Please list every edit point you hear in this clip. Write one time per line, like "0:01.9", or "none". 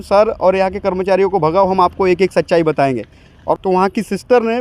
0:03.6